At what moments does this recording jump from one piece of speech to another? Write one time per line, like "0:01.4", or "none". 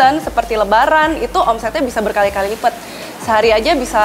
none

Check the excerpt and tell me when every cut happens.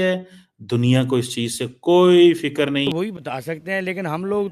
0:02.9

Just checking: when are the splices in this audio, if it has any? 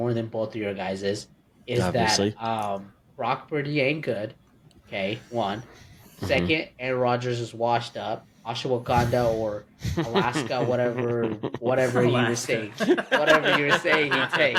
none

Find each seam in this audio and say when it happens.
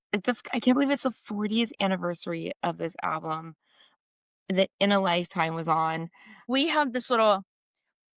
0:03.9
0:06.4

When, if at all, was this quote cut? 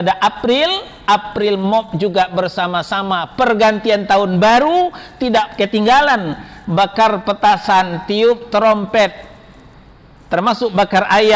0:05.5

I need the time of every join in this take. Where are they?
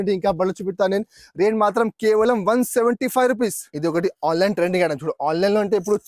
0:03.7

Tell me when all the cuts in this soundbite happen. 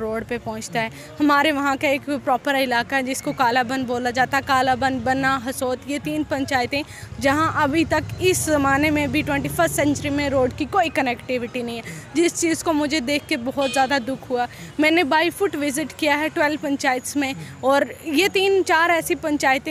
none

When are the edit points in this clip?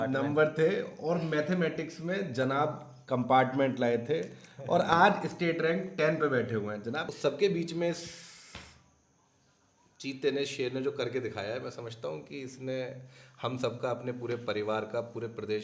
0:07.1

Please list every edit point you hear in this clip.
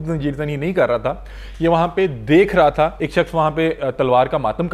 0:03.0

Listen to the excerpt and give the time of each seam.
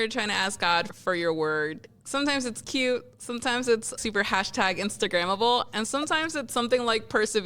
0:00.9

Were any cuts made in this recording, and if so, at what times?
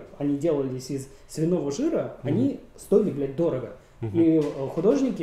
none

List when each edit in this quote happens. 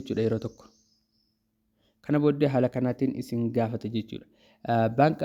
none

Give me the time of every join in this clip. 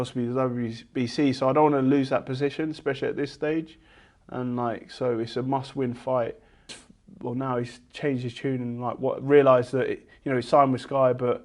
0:06.8

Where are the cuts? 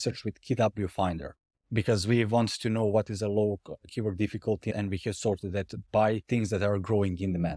0:04.7
0:06.2

